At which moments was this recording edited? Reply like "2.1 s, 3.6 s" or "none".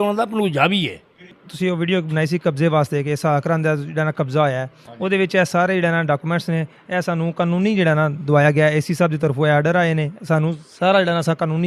1.4 s